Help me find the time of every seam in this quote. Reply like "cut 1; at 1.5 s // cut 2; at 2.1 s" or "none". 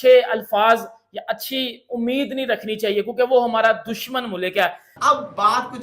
cut 1; at 4.9 s

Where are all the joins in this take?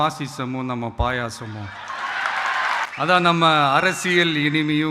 cut 1; at 2.9 s

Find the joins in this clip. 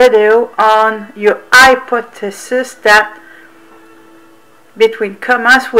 none

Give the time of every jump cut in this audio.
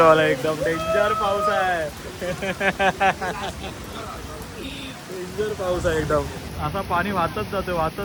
none

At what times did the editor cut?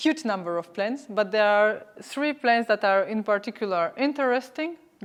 none

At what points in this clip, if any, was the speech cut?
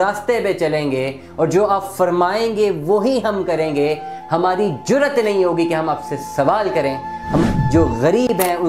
cut 1; at 7.5 s

